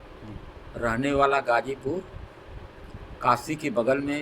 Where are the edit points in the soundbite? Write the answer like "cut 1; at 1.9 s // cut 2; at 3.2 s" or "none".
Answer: none